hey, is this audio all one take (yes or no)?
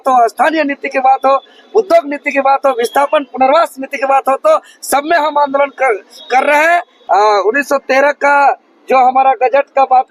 no